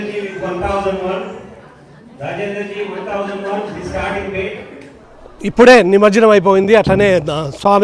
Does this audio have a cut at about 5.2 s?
yes; 1 cut; at 5.2 s

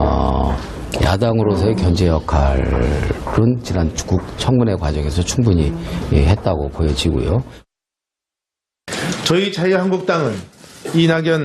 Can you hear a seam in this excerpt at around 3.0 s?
no; 1 cut; at 1.2 s

